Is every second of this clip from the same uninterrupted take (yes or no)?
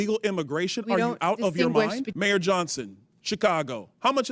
no